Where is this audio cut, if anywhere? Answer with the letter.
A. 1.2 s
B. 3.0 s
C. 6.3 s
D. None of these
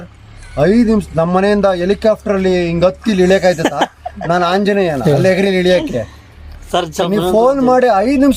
D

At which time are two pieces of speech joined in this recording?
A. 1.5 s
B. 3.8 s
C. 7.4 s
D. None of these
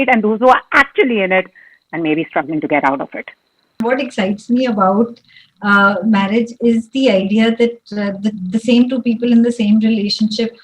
B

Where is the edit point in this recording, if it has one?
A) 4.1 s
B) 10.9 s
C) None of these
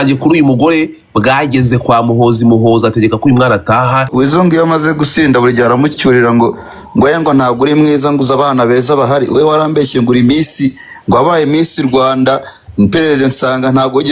A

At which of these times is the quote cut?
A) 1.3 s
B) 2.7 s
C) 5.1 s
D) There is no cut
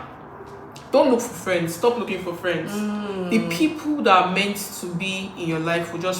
D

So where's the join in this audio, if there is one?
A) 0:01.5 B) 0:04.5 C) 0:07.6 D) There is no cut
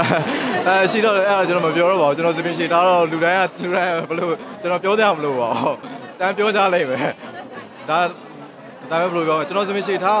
D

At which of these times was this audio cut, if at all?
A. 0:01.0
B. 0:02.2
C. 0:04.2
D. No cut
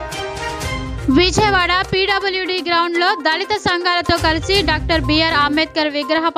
A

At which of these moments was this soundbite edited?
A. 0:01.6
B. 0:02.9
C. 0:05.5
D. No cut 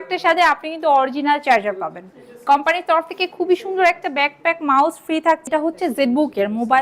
C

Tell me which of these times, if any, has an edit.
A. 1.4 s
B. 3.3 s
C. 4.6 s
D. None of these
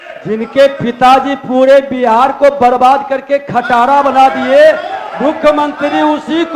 D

